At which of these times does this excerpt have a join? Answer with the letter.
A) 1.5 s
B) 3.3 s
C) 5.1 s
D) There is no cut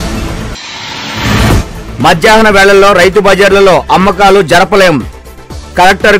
A